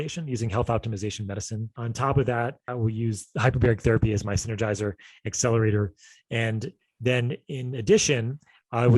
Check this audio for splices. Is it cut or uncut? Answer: cut